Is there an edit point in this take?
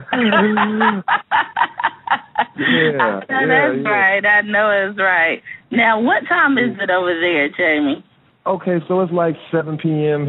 yes; 1 cut; at 5.6 s

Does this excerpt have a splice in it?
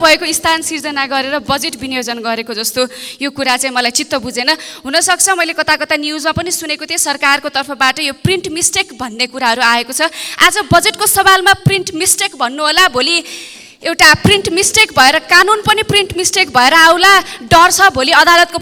no; 0 cuts

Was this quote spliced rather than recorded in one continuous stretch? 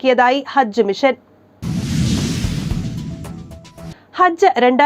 yes; 2 cuts; at 1.5 s, 3.9 s

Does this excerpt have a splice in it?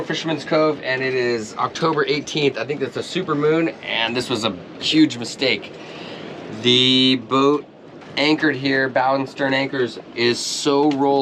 no; 0 cuts

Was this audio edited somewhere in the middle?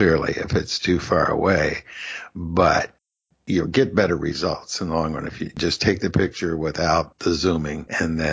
yes; 2 cuts; at 5.5 s, 7.3 s

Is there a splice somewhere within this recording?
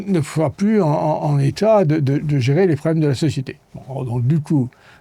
no; 0 cuts

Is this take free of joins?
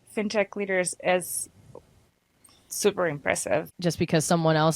no; 1 cut; at 3.7 s

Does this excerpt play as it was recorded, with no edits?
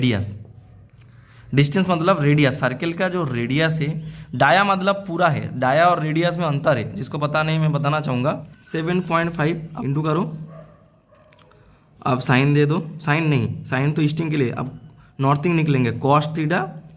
no; 2 cuts; at 8.5 s, 9.7 s

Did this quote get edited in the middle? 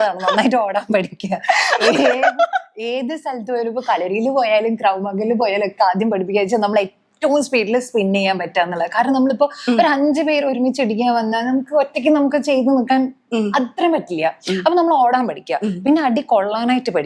no; 0 cuts

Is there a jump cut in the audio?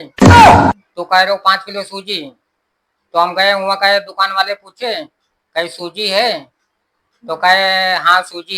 yes; 1 cut; at 0.9 s

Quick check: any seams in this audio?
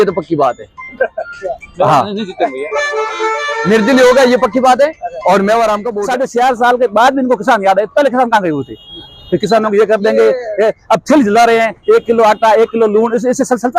yes; 1 cut; at 5.9 s

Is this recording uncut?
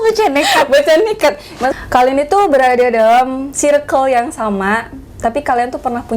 no; 1 cut; at 1.7 s

